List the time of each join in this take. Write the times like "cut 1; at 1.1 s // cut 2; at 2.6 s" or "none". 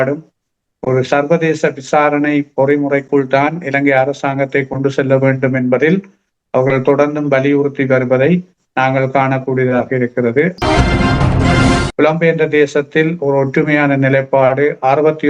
cut 1; at 10.5 s // cut 2; at 11.8 s